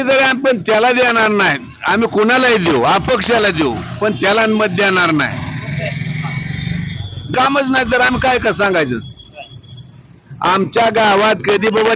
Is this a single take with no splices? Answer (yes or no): yes